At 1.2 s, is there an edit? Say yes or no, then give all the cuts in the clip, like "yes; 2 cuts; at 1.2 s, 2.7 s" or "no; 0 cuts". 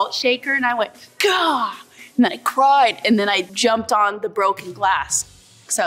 no; 0 cuts